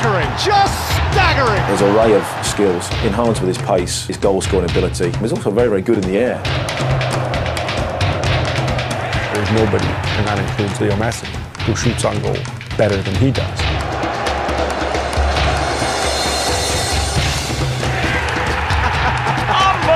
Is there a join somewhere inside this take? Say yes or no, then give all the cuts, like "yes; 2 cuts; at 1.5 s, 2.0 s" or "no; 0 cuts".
yes; 1 cut; at 5.4 s